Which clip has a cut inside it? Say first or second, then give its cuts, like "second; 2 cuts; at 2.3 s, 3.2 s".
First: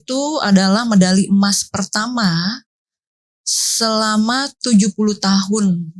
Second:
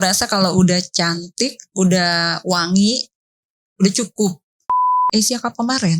second; 1 cut; at 5.0 s